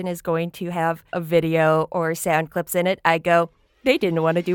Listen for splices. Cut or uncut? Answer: cut